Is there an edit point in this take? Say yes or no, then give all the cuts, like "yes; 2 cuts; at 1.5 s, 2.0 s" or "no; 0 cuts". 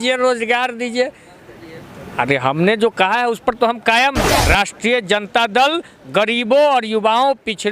yes; 1 cut; at 4.3 s